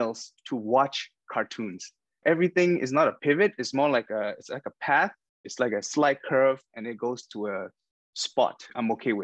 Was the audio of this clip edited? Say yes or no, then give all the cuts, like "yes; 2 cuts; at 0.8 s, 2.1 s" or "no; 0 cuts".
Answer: yes; 1 cut; at 2.2 s